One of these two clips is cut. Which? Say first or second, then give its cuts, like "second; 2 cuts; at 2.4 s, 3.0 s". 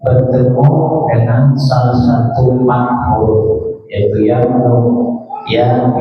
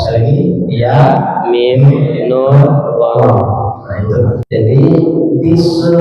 second; 1 cut; at 4.4 s